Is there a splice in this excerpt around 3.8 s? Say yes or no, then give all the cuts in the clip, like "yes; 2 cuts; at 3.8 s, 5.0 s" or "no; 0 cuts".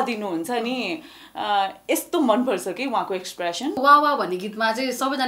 yes; 1 cut; at 3.8 s